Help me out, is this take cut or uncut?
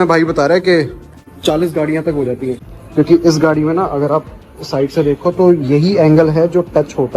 cut